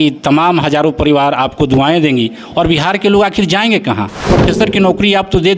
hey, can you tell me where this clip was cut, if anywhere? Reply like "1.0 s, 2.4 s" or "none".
4.1 s